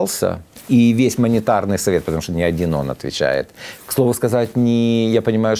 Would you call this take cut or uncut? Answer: uncut